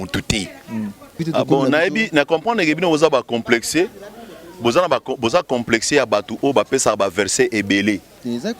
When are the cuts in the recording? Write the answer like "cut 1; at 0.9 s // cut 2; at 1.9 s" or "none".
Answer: cut 1; at 1.2 s